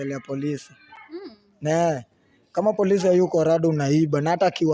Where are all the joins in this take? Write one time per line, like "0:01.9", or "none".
none